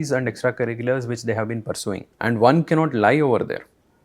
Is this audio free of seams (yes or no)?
no